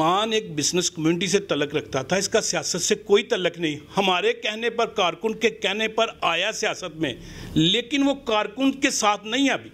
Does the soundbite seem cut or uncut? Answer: uncut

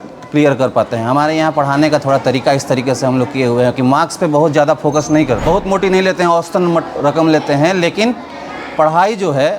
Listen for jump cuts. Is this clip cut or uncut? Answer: cut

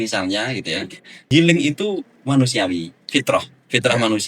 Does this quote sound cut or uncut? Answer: cut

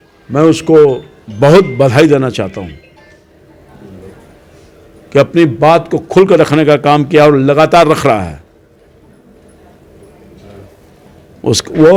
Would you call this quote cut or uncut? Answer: uncut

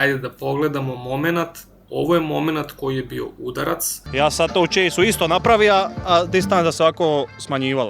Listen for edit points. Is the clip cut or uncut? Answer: cut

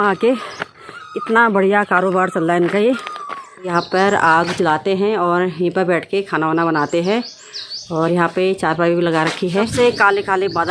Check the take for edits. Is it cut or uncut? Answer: cut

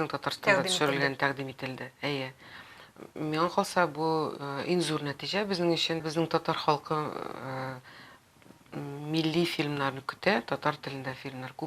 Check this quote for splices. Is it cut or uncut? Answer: cut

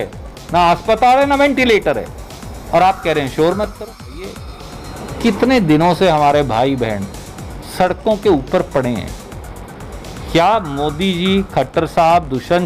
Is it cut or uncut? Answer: cut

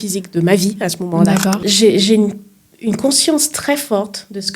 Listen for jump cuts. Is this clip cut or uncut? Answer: cut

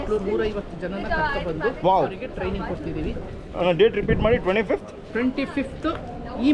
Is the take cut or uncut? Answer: uncut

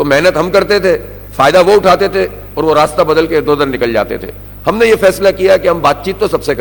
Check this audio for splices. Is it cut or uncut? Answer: uncut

